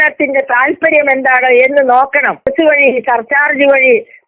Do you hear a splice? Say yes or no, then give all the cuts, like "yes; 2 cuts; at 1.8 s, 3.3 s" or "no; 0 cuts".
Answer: yes; 1 cut; at 2.5 s